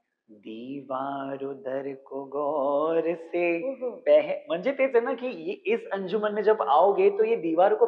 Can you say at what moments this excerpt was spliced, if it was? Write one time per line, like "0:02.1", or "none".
none